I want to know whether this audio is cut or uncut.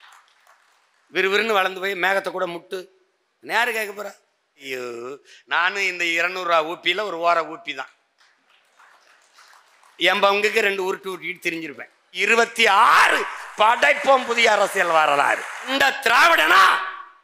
cut